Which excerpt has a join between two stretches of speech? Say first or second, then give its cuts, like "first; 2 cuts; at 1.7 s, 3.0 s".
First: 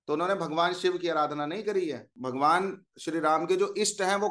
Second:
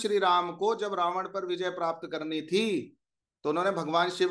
first; 1 cut; at 2.1 s